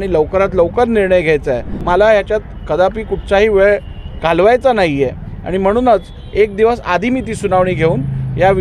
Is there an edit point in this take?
yes; 1 cut; at 1.7 s

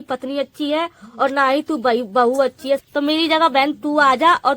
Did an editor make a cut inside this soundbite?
yes; 1 cut; at 2.8 s

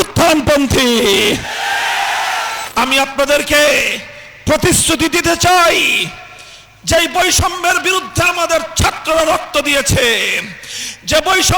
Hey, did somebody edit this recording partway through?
yes; 1 cut; at 2.6 s

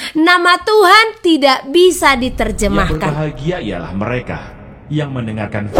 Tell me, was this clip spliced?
yes; 1 cut; at 3.0 s

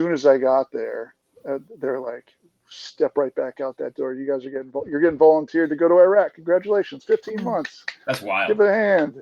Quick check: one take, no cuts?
yes; 0 cuts

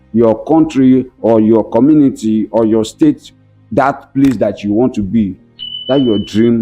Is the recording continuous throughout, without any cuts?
yes; 0 cuts

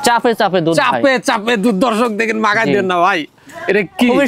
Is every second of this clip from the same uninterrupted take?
yes; 0 cuts

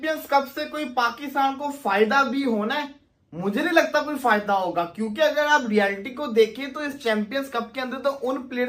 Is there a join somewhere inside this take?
no; 0 cuts

